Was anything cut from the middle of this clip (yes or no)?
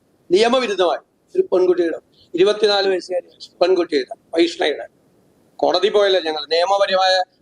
no